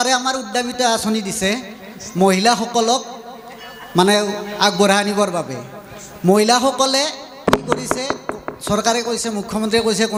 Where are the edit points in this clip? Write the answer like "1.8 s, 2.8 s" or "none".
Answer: none